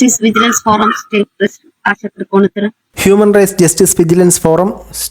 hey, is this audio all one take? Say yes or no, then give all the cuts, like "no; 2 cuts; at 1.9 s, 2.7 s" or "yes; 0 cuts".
no; 1 cut; at 2.8 s